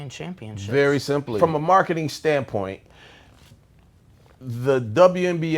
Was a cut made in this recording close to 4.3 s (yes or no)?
no